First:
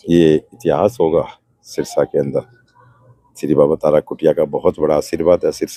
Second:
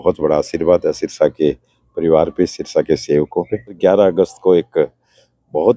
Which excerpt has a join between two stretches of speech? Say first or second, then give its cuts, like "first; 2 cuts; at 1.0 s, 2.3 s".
second; 1 cut; at 3.8 s